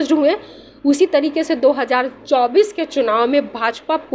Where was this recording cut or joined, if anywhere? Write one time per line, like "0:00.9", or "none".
none